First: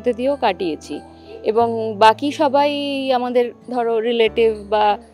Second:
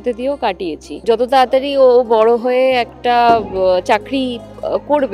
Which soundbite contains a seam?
second; 1 cut; at 1.0 s

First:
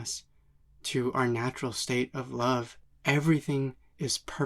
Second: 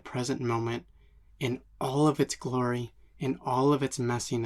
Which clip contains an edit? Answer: first; 1 cut; at 2.8 s

